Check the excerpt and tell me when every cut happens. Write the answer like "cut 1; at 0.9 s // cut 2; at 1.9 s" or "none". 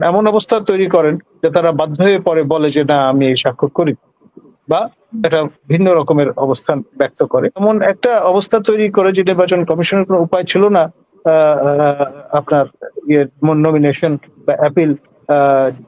cut 1; at 7.6 s